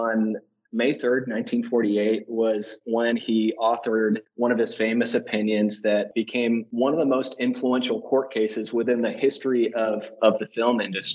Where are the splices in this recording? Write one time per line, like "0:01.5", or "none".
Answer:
0:04.3
0:06.2